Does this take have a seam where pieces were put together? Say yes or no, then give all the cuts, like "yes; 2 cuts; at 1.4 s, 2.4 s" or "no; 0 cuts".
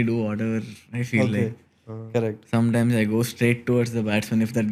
no; 0 cuts